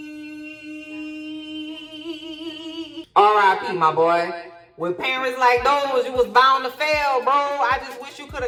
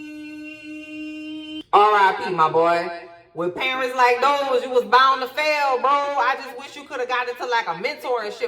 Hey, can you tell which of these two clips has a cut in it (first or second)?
second